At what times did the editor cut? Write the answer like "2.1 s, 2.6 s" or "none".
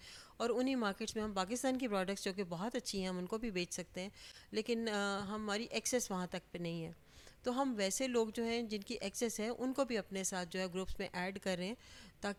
none